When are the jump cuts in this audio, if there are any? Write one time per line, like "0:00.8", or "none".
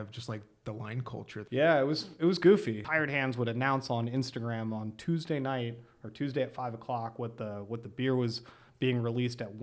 0:01.4
0:02.8